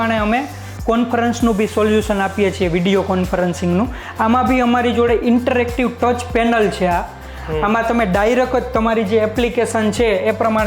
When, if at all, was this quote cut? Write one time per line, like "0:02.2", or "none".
none